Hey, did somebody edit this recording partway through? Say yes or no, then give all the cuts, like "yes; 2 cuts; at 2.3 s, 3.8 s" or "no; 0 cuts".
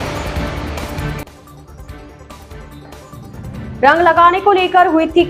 yes; 1 cut; at 2.4 s